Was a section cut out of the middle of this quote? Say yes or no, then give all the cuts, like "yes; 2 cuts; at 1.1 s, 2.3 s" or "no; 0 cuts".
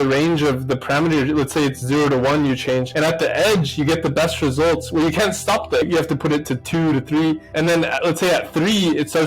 yes; 1 cut; at 5.8 s